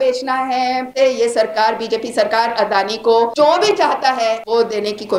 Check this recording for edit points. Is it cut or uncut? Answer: cut